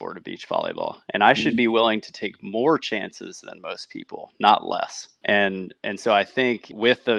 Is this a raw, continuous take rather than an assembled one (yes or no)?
yes